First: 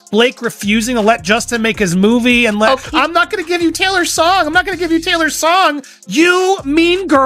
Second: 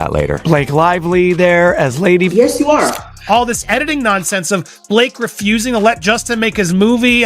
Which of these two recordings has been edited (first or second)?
second